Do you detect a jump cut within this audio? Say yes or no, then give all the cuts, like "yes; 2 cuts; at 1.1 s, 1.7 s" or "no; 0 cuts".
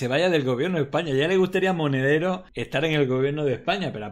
yes; 1 cut; at 2.5 s